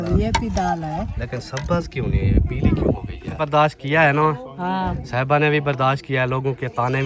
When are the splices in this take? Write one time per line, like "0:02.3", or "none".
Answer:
0:03.4